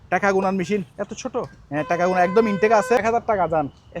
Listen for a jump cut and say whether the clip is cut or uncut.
cut